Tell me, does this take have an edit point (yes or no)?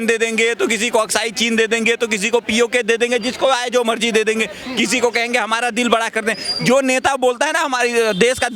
no